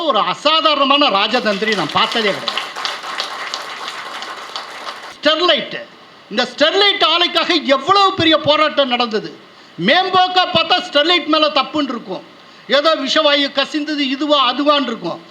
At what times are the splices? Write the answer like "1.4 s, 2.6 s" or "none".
5.0 s